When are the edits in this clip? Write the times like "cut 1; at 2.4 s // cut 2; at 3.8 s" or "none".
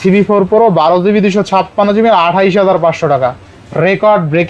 none